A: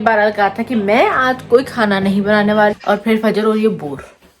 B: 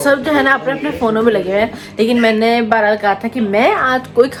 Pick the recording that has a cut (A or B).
A